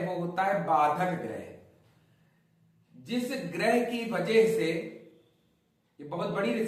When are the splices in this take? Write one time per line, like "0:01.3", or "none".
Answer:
none